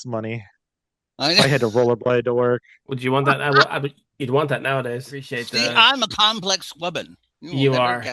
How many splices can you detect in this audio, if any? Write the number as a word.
one